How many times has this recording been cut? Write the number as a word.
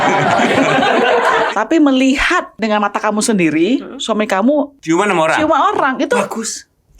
three